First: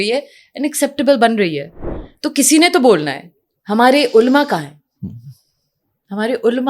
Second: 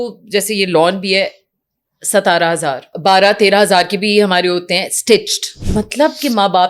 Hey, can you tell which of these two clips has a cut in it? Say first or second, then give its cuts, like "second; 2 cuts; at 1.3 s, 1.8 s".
second; 2 cuts; at 2.9 s, 5.6 s